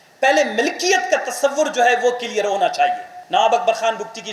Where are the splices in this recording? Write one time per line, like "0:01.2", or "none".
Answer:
0:03.1